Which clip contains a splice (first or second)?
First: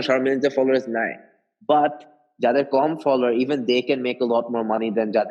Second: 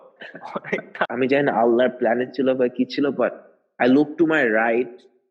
second